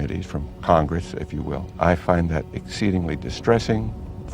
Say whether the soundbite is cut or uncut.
cut